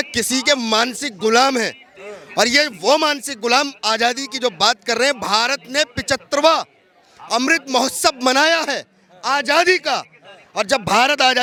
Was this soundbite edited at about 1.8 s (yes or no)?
no